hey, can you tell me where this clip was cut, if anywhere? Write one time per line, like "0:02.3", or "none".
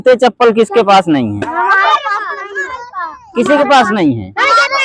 none